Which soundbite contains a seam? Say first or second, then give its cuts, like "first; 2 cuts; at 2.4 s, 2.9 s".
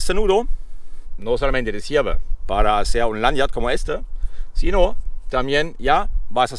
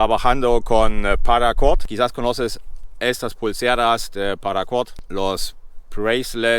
second; 2 cuts; at 1.8 s, 5.0 s